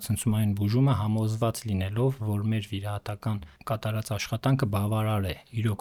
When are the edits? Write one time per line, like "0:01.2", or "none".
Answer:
none